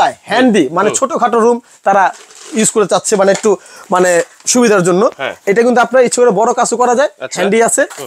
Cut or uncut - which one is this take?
uncut